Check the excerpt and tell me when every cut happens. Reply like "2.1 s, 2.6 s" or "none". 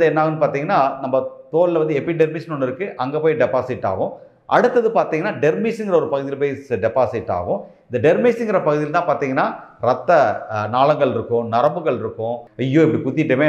12.5 s